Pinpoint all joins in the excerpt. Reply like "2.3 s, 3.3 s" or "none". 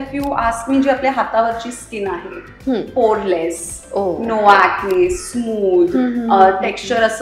none